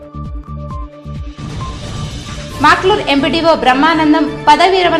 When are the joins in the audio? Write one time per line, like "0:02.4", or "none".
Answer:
none

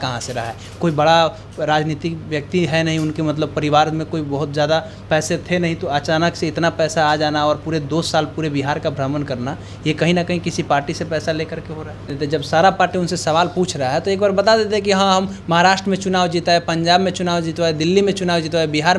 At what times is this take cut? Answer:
0:12.1

